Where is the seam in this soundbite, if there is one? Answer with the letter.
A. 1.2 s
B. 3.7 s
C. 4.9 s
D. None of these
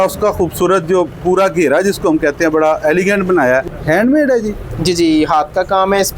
B